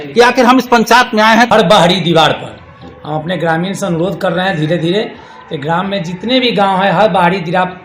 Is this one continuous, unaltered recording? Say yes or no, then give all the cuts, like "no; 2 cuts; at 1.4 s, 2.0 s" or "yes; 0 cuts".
no; 1 cut; at 1.5 s